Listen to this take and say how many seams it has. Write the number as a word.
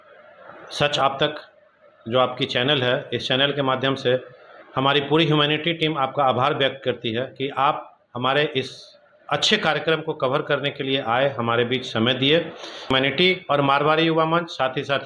one